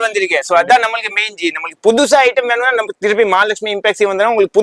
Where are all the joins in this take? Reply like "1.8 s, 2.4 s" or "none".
none